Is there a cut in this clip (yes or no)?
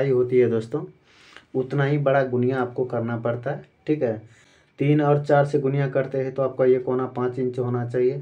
yes